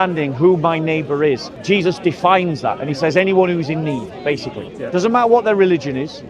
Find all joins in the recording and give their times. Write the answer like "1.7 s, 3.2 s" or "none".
1.5 s, 4.7 s